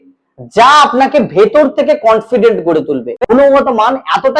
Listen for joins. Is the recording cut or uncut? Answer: cut